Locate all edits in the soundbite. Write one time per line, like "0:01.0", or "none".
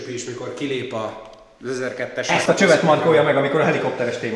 0:02.3